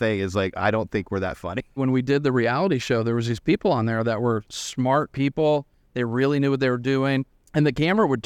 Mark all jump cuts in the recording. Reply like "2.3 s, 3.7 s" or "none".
1.8 s, 5.8 s, 7.4 s